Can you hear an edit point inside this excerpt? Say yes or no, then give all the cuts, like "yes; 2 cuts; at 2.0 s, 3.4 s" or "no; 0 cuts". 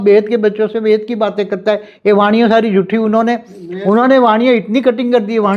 no; 0 cuts